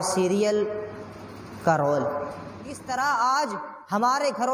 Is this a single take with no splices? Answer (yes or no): no